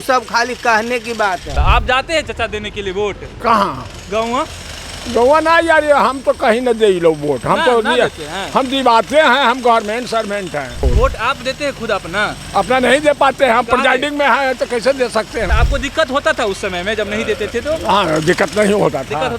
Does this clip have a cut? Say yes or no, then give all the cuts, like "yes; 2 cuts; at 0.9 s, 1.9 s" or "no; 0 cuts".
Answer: yes; 3 cuts; at 1.5 s, 10.9 s, 15.5 s